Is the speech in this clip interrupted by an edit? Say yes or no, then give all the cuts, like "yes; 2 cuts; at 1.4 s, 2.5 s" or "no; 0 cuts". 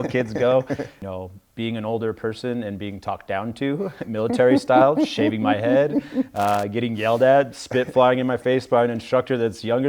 yes; 1 cut; at 0.9 s